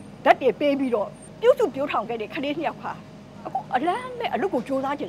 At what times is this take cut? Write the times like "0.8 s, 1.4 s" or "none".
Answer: 1.2 s